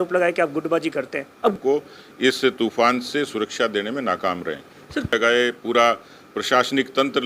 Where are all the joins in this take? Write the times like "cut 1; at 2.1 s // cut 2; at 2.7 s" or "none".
cut 1; at 1.5 s // cut 2; at 5.1 s